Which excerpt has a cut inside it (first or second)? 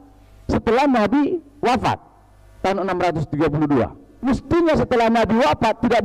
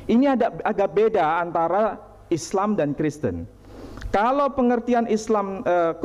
first